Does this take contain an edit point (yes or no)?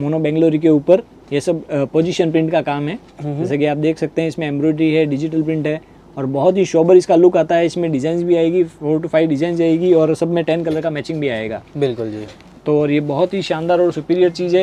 no